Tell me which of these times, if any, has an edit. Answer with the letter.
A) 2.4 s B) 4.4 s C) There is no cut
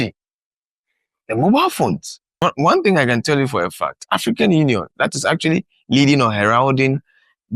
A